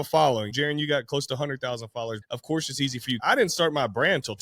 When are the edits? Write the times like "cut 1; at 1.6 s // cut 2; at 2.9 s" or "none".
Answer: cut 1; at 2.2 s // cut 2; at 3.2 s